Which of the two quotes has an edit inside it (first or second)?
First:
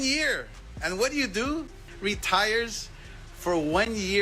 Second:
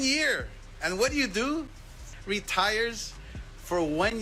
first